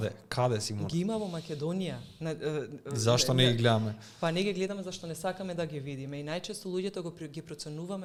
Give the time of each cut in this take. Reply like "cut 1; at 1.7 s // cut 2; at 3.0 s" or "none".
none